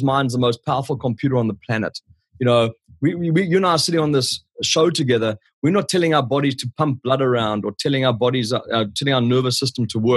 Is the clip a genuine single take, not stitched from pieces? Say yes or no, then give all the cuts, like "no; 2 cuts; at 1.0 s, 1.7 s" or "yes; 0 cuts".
yes; 0 cuts